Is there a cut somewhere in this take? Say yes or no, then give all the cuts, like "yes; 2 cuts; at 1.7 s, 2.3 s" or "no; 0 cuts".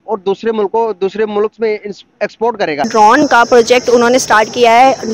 yes; 1 cut; at 2.8 s